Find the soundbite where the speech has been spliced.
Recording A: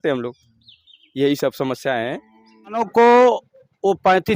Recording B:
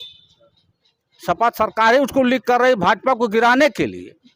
A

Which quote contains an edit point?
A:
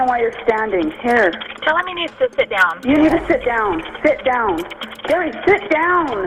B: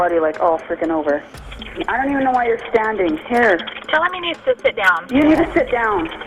B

